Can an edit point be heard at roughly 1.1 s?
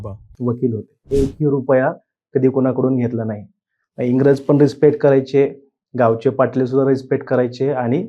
yes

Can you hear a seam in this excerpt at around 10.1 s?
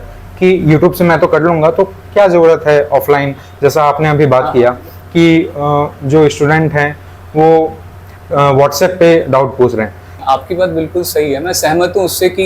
yes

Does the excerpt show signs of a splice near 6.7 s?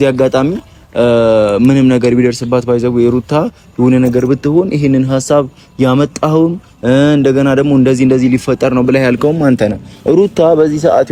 no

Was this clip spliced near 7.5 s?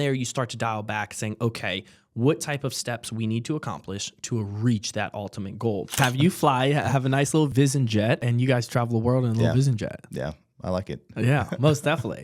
yes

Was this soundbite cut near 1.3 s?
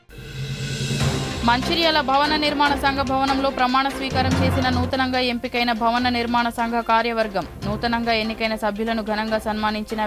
yes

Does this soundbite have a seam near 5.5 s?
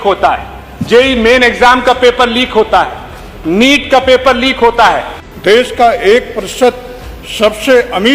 yes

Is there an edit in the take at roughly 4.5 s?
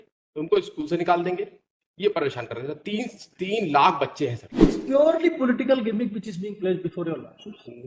yes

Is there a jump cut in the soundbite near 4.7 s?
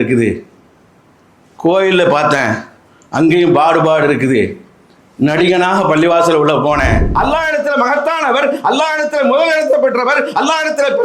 no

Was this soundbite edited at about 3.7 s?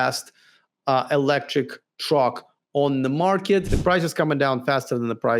yes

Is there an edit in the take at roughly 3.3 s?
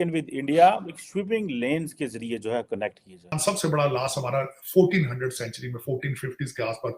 yes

